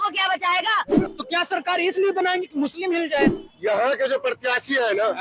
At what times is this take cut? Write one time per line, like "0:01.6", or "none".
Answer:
0:01.1